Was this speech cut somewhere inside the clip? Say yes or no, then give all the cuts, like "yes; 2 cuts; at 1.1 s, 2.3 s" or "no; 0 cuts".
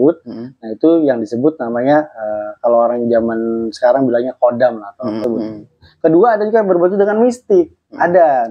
yes; 1 cut; at 5.2 s